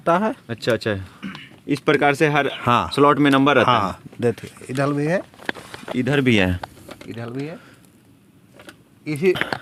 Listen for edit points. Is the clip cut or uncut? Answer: uncut